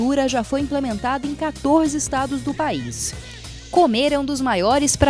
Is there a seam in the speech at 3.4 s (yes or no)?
yes